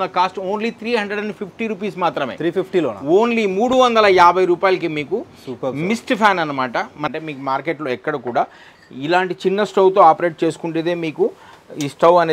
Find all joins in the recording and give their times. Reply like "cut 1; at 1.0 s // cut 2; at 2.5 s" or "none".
cut 1; at 7.1 s